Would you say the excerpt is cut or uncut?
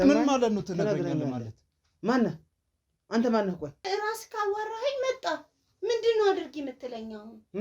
cut